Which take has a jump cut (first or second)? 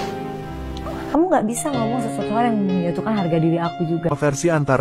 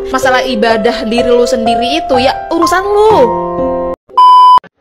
second